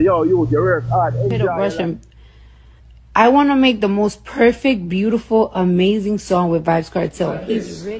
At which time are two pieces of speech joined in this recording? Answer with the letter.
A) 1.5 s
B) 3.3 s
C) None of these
A